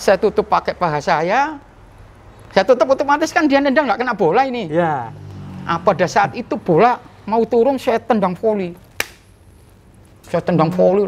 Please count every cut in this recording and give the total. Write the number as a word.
zero